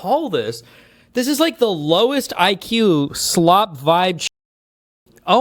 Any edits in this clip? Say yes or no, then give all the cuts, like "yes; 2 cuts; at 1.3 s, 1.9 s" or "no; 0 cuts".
no; 0 cuts